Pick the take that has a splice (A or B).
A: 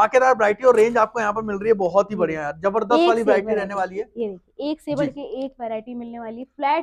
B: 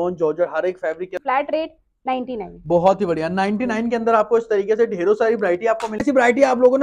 B